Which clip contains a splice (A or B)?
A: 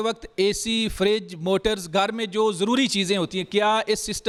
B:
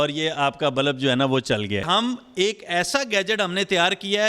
B